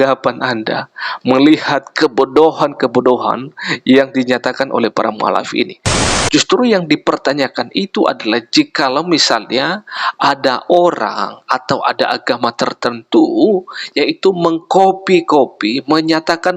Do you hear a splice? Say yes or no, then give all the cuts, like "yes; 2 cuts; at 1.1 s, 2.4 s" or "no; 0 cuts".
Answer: yes; 1 cut; at 6.0 s